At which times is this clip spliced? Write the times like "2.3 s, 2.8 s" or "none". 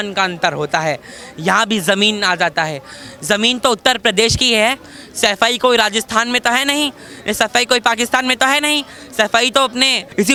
none